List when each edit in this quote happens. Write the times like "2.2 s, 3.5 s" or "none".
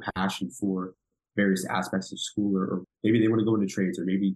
2.8 s